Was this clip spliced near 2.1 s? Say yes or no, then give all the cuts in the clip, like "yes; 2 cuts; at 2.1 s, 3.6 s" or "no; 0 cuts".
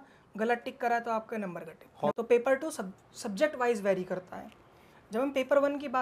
yes; 1 cut; at 2.1 s